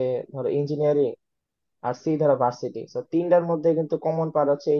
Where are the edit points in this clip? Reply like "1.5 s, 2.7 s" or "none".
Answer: none

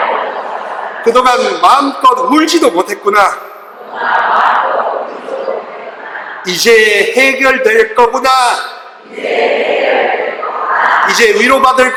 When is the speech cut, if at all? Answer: none

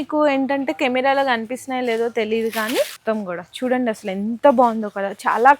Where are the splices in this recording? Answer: 3.0 s

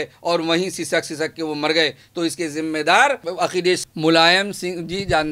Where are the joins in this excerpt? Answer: 3.9 s

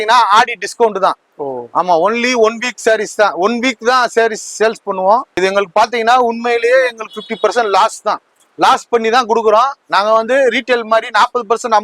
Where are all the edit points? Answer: 5.4 s

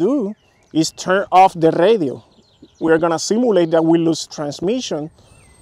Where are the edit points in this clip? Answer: none

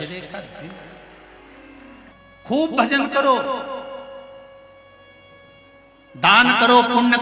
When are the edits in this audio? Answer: 1.1 s, 2.6 s

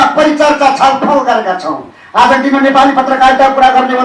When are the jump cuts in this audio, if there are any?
none

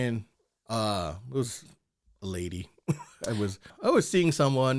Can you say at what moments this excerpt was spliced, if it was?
3.7 s

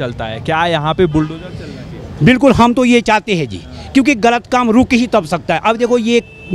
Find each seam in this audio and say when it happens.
none

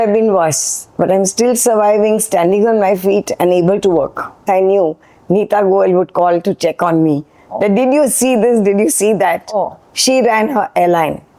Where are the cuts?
4.4 s

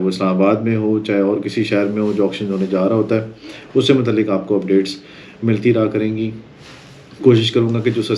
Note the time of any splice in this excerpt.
none

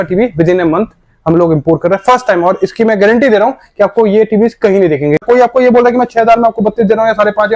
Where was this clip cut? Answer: 5.2 s

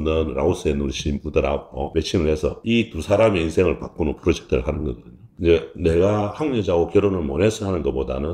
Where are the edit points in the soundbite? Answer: 5.3 s

